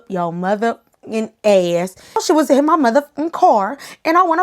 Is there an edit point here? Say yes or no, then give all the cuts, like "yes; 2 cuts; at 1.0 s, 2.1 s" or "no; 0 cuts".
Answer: yes; 1 cut; at 2.2 s